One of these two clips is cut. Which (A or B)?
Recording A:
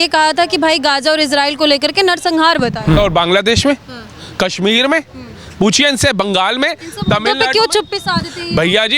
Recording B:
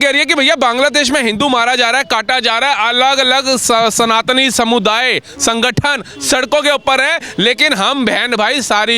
A